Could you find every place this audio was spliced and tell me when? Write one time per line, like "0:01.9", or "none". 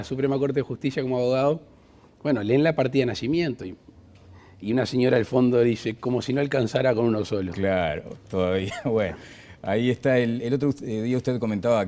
0:00.9